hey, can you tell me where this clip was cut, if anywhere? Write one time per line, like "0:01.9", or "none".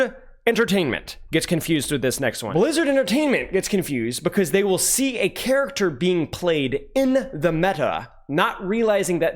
0:02.4